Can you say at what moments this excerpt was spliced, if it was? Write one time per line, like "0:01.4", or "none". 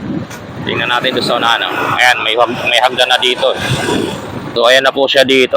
0:04.5

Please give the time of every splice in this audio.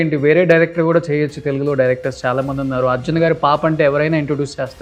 none

